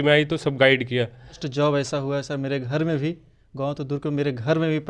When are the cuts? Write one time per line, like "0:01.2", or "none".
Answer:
0:01.4